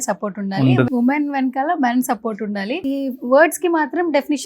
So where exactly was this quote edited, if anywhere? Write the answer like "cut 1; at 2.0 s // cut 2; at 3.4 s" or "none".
cut 1; at 0.9 s // cut 2; at 2.8 s